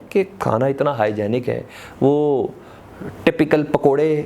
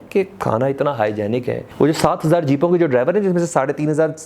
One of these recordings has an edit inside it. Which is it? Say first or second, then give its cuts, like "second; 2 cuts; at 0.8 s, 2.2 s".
second; 1 cut; at 1.6 s